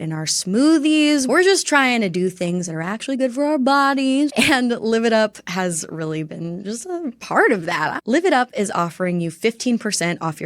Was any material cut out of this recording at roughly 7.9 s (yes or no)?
yes